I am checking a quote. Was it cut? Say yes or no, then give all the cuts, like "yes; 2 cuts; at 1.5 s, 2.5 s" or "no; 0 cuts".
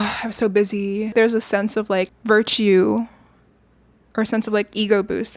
yes; 2 cuts; at 1.1 s, 2.2 s